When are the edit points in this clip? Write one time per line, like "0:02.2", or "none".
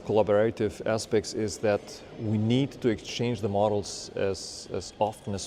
none